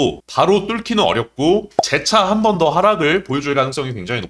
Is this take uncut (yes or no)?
yes